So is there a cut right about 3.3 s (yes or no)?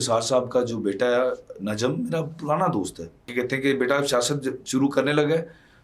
yes